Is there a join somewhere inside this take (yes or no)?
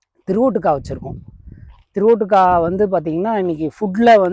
no